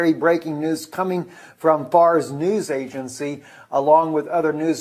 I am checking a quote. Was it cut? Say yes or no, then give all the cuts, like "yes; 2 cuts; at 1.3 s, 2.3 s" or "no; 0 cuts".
yes; 1 cut; at 1.0 s